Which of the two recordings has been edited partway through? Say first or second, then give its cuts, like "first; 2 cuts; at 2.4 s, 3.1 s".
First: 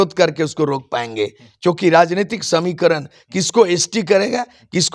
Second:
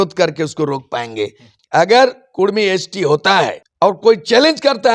second; 2 cuts; at 1.5 s, 3.6 s